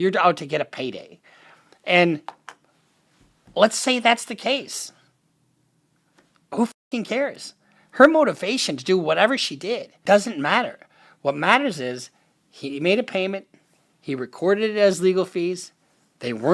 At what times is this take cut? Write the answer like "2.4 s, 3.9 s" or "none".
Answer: 9.9 s